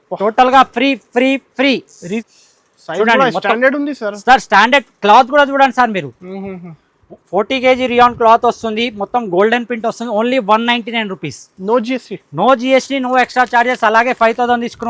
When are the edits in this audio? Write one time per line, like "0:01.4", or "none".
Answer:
0:01.9